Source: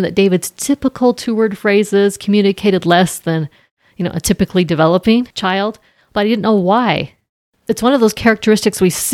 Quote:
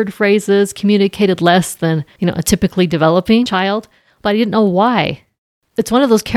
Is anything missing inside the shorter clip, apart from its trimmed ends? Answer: yes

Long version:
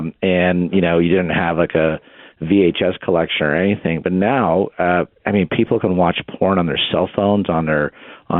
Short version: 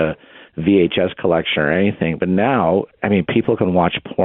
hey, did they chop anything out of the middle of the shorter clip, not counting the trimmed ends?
yes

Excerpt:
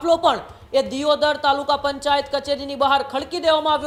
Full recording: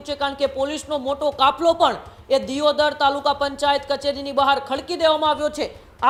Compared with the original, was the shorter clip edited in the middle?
no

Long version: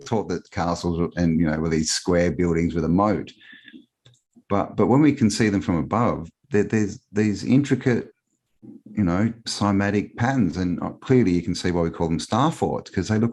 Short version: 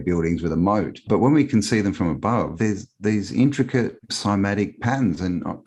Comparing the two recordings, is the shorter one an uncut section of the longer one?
no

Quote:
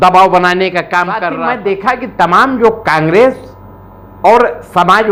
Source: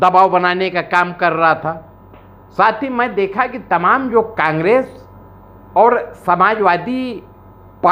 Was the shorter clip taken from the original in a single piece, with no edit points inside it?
no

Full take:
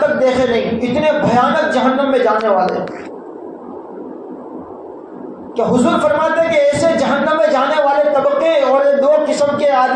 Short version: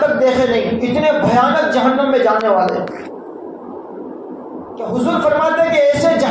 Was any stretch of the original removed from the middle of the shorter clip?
yes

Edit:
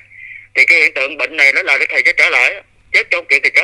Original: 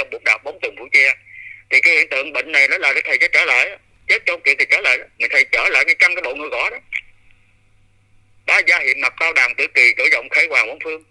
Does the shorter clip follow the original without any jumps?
yes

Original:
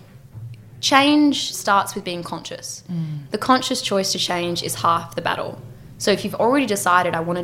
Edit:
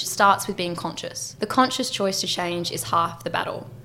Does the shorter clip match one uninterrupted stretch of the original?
no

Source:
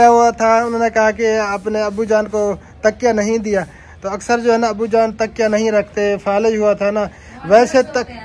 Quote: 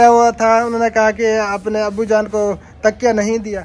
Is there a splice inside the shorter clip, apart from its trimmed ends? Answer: no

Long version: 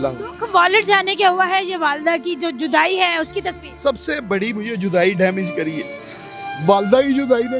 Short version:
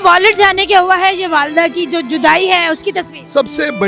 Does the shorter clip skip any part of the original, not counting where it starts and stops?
no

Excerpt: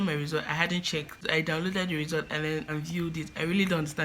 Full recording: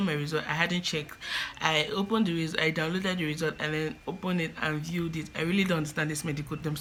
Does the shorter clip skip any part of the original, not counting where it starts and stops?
yes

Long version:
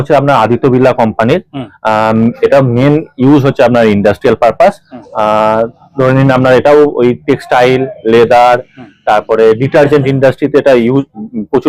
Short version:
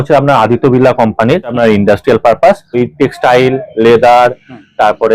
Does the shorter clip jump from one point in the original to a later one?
yes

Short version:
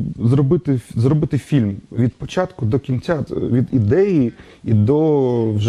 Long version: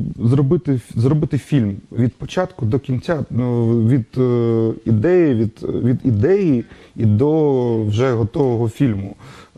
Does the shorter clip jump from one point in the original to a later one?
yes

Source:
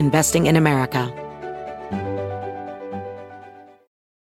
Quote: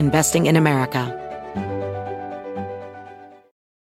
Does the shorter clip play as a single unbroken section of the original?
no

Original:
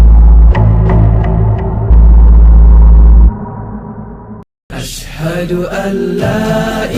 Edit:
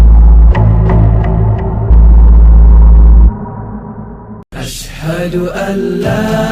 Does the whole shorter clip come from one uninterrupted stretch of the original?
no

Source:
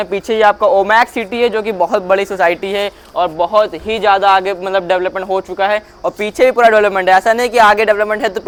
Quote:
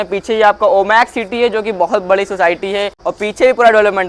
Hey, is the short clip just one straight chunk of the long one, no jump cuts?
no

